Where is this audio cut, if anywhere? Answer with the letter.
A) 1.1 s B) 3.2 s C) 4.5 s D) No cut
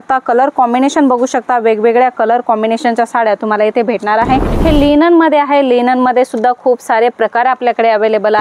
C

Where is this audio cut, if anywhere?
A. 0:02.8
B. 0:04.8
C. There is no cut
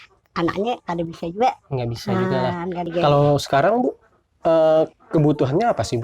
A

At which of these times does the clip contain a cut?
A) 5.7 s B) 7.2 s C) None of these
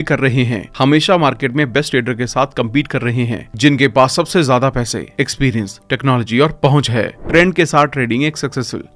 B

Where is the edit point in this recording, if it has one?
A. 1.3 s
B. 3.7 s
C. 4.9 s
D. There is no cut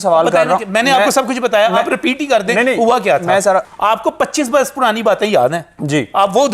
B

